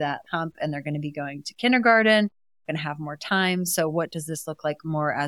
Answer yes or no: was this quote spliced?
no